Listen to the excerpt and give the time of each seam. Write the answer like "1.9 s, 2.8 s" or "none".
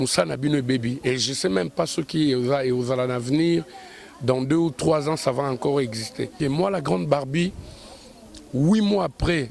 6.3 s